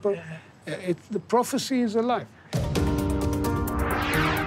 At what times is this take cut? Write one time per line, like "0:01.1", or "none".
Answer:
0:02.5